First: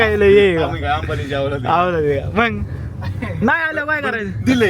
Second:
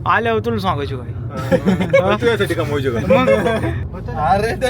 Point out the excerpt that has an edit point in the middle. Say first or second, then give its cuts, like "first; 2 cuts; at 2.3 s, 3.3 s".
second; 1 cut; at 3.8 s